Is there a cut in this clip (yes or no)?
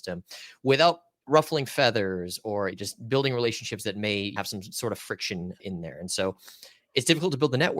yes